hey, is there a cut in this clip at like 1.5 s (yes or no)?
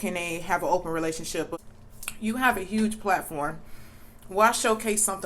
yes